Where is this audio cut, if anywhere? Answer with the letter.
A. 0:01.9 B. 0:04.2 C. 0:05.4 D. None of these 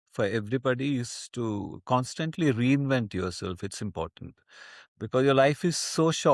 D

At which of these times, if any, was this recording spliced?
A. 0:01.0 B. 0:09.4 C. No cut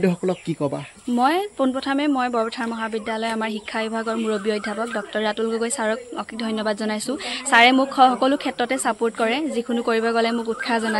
A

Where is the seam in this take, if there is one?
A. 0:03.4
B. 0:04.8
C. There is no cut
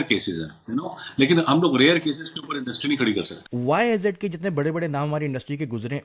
A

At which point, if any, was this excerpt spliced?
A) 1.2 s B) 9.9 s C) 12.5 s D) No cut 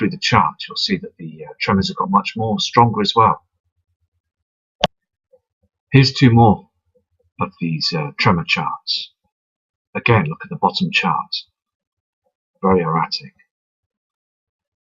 C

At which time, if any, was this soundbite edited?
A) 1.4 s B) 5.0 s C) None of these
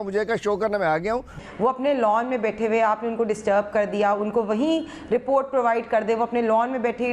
A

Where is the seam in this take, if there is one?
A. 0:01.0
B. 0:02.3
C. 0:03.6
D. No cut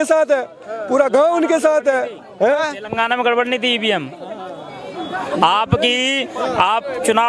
D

